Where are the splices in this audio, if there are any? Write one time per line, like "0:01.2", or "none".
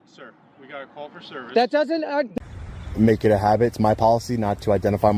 0:02.3